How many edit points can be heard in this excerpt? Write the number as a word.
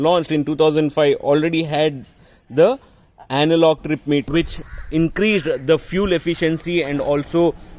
one